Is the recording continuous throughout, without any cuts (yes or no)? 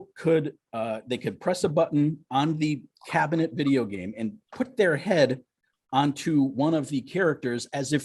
yes